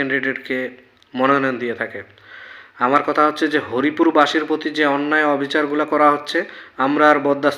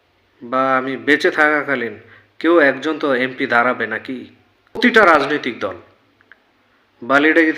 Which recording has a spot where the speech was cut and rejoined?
second; 1 cut; at 4.8 s

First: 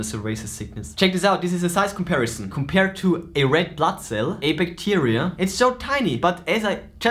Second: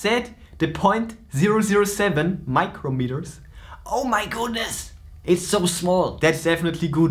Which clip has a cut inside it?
first; 3 cuts; at 0.8 s, 2.5 s, 6.2 s

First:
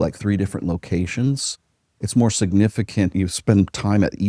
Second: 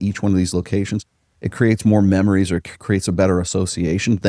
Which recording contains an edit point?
first; 1 cut; at 3.1 s

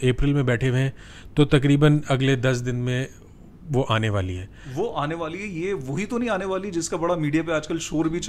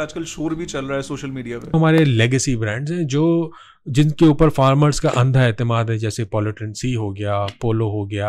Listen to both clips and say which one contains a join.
second; 1 cut; at 1.7 s

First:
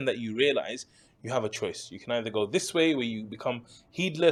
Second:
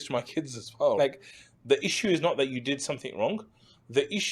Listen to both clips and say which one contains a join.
second; 1 cut; at 1.0 s

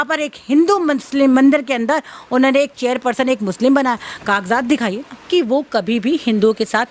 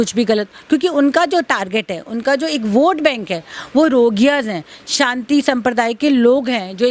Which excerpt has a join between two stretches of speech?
first; 1 cut; at 5.3 s

